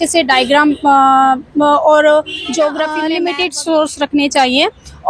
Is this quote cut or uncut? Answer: cut